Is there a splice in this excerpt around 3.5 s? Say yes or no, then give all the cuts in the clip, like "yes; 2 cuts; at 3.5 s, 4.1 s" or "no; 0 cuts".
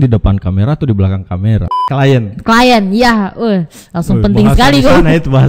no; 1 cut; at 1.7 s